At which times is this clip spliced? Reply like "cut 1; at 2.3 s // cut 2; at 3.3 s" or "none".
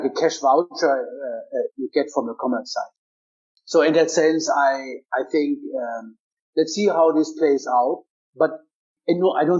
none